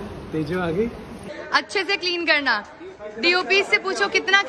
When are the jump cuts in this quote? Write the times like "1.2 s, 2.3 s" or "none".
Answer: 1.3 s